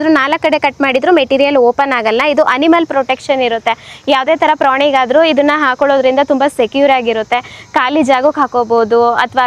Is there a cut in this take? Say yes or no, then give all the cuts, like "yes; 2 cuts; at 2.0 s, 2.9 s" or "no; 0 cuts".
no; 0 cuts